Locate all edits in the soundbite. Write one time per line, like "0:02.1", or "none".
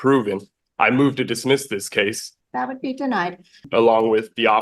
0:02.3
0:03.6